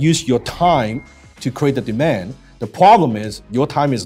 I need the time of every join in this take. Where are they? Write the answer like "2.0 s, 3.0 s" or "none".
none